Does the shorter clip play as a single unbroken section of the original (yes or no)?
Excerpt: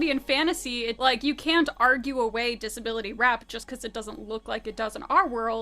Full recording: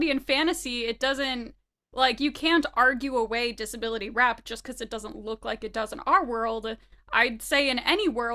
no